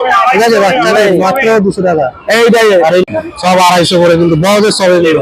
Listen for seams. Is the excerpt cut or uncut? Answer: cut